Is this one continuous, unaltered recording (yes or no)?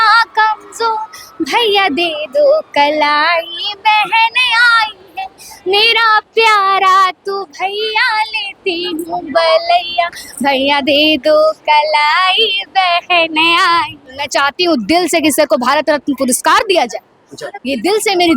no